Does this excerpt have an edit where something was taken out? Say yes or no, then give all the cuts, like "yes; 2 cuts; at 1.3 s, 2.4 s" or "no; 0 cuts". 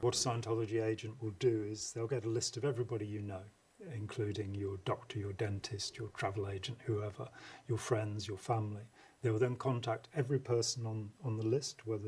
no; 0 cuts